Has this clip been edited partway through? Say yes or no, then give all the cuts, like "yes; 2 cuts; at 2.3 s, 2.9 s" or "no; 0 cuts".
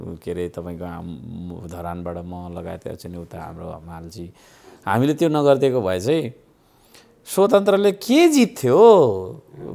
no; 0 cuts